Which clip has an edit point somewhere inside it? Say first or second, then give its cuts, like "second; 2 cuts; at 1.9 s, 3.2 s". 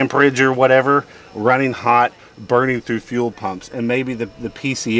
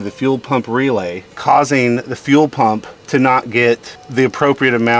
second; 3 cuts; at 1.2 s, 2.9 s, 4.0 s